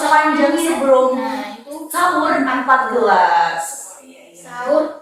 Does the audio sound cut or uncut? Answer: uncut